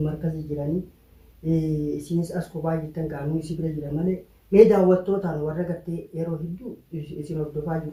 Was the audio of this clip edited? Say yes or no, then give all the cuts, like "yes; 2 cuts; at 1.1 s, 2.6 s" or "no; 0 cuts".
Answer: no; 0 cuts